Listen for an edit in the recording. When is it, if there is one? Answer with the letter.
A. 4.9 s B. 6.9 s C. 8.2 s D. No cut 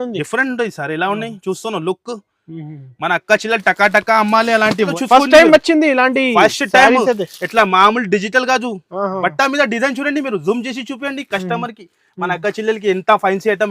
A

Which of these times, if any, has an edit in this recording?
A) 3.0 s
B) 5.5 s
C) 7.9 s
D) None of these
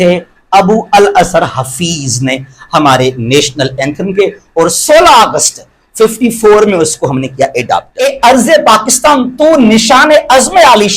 C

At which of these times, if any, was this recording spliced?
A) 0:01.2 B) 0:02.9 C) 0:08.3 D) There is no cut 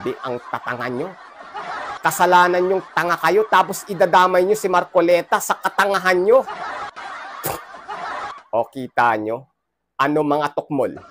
C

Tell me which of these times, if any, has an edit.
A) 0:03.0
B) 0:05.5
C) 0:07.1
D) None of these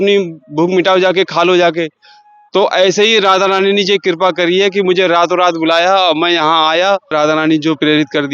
C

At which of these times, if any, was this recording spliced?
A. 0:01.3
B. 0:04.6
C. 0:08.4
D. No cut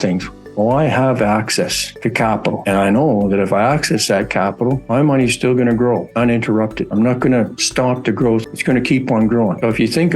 C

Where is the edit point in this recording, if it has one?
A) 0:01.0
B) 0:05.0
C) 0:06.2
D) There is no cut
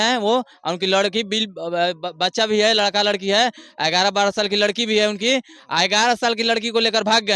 D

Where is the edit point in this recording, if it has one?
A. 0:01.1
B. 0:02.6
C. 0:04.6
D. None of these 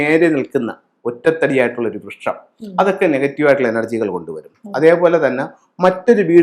D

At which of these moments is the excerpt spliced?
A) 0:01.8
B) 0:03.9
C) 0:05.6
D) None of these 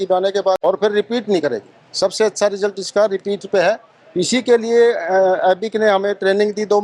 D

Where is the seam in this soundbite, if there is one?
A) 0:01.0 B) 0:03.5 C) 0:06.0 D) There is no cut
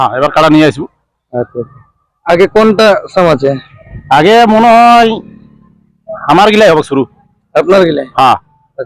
D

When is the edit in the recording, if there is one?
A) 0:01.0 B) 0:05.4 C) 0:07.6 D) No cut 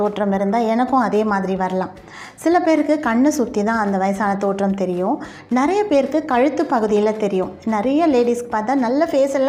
D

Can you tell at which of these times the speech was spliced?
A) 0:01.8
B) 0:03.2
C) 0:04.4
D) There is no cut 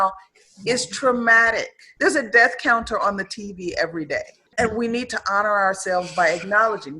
C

